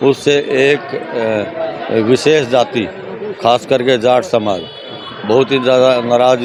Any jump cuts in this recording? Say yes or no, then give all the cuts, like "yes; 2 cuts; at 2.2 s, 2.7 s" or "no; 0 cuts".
no; 0 cuts